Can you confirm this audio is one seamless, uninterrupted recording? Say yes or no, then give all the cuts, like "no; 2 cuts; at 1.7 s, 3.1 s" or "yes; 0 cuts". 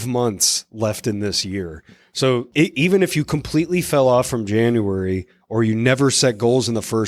no; 1 cut; at 2.5 s